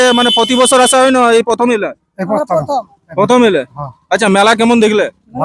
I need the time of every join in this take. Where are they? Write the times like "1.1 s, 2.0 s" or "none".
none